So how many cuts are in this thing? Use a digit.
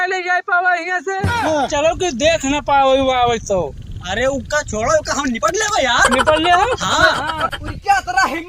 2